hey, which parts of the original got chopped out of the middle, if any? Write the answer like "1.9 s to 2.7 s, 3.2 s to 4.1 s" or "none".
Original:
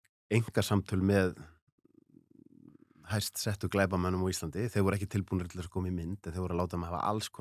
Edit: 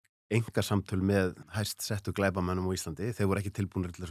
1.4 s to 3.0 s

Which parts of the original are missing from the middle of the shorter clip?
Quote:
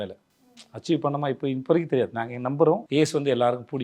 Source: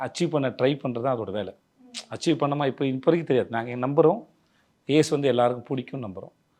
4.2 s to 4.8 s

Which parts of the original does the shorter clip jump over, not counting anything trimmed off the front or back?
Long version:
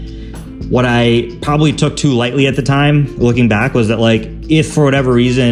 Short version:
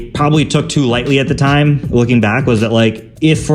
none

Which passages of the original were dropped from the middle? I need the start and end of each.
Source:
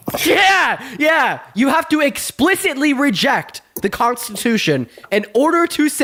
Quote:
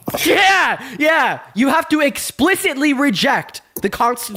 none

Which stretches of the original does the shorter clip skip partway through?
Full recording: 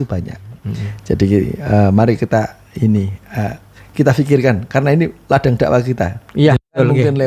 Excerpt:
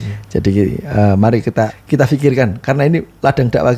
2.5 s to 3.8 s

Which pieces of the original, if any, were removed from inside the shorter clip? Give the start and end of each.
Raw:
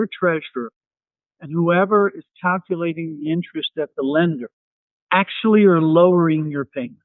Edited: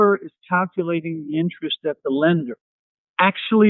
none

